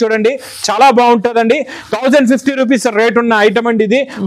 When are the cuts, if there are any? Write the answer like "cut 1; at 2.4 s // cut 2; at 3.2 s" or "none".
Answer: none